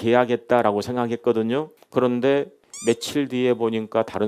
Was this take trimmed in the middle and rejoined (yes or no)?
yes